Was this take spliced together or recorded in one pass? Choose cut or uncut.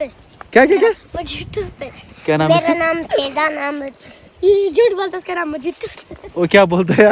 uncut